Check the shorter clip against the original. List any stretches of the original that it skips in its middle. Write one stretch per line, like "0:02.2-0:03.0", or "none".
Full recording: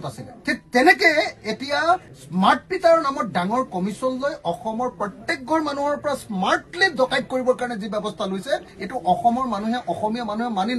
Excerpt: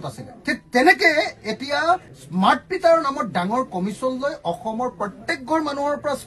none